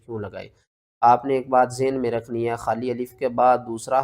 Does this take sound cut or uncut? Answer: uncut